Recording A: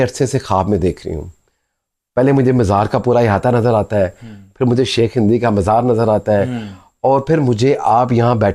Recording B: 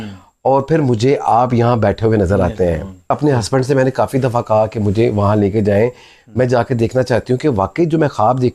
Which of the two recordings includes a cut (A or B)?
B